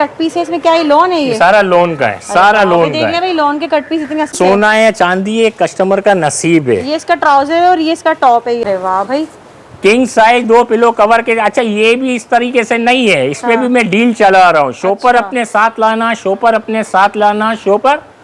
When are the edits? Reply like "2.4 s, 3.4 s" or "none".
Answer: 4.3 s, 8.6 s